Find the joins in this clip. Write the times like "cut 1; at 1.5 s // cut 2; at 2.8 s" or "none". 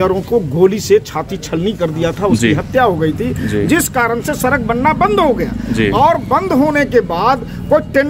none